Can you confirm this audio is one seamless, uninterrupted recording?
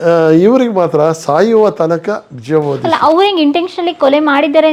yes; 0 cuts

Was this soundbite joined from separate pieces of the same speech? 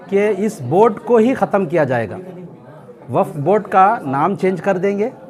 no; 0 cuts

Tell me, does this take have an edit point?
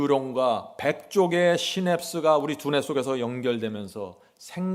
no; 0 cuts

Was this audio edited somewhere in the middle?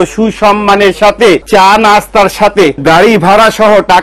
yes; 2 cuts; at 1.4 s, 2.8 s

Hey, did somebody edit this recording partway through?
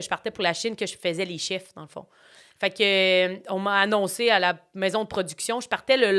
no; 0 cuts

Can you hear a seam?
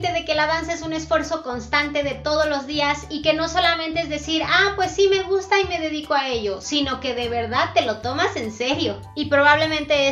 no; 0 cuts

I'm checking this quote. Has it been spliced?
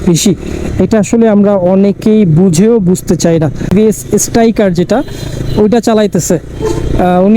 yes; 1 cut; at 3.7 s

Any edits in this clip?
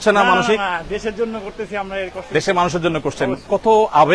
no; 0 cuts

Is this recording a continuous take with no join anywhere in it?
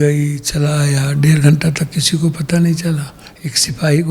yes; 0 cuts

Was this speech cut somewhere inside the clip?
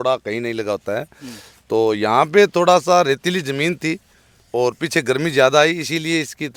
no; 0 cuts

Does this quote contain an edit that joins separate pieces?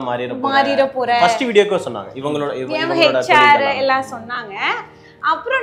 no; 0 cuts

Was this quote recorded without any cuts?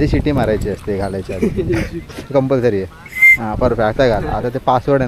yes; 0 cuts

